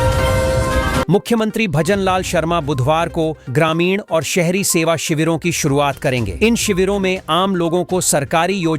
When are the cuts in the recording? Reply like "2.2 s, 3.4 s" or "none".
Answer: 1.0 s